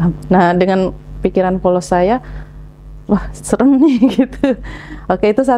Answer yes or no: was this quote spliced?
no